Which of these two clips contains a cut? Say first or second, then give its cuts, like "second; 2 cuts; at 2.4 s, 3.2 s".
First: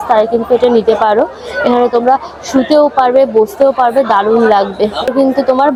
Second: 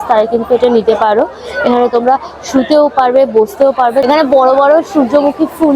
second; 1 cut; at 4.0 s